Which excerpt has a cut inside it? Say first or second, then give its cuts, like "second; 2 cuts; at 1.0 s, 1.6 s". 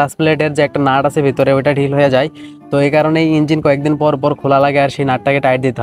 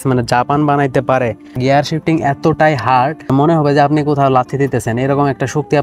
second; 2 cuts; at 1.6 s, 3.3 s